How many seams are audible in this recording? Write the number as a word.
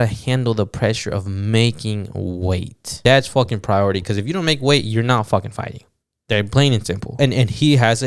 two